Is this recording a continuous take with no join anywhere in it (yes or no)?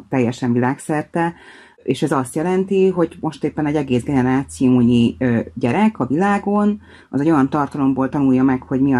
no